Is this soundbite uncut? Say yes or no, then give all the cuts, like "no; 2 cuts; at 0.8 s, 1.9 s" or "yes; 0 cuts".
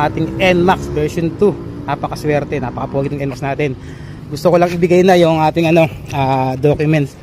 yes; 0 cuts